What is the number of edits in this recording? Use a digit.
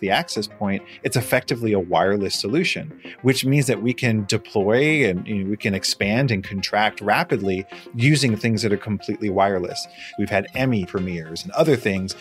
1